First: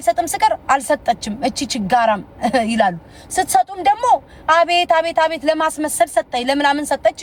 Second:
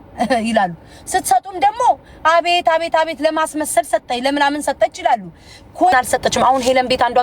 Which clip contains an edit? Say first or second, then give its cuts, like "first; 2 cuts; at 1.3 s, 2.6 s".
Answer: second; 1 cut; at 5.9 s